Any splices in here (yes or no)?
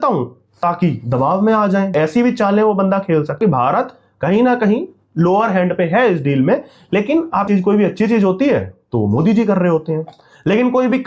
yes